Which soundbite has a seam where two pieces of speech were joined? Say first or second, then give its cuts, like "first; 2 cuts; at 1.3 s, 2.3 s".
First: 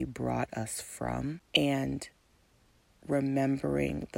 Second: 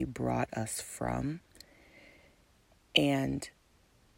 first; 1 cut; at 1.4 s